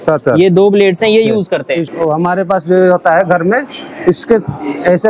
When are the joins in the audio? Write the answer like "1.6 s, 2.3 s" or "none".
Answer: 1.8 s